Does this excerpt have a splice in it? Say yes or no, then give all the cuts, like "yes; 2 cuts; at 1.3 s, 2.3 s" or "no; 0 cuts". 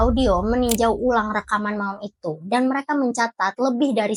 no; 0 cuts